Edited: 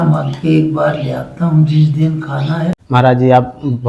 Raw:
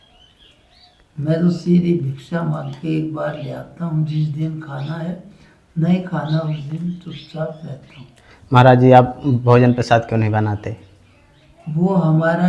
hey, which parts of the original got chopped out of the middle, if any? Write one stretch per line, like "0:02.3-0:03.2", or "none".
0:05.2-0:08.4